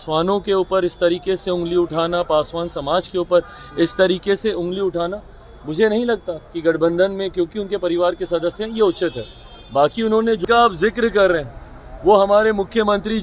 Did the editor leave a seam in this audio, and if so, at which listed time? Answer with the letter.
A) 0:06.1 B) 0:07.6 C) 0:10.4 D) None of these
C